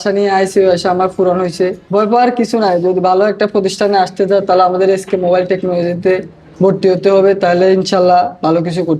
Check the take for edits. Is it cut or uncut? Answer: cut